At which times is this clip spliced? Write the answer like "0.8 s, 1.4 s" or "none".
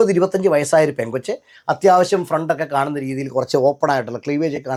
none